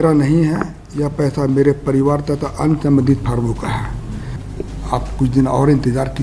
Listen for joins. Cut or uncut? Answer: cut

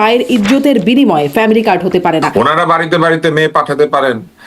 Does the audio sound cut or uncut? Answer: cut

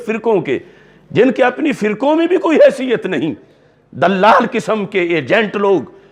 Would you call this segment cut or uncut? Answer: uncut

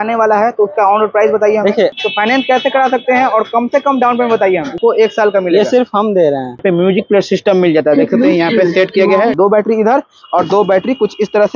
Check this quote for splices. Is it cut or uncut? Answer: cut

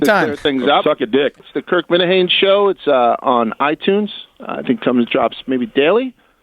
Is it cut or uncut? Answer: cut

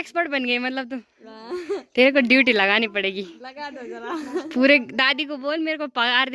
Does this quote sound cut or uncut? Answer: uncut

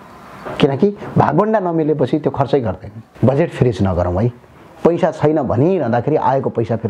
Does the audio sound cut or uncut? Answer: cut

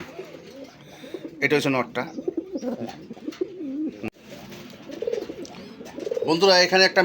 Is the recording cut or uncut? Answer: cut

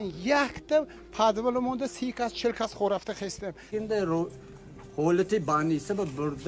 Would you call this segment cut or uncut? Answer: uncut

